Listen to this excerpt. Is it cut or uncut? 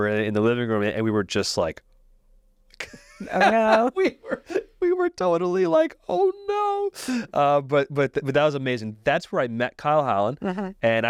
uncut